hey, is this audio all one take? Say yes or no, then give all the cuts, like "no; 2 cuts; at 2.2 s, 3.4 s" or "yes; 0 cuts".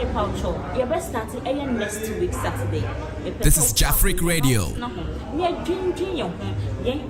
no; 2 cuts; at 3.4 s, 4.7 s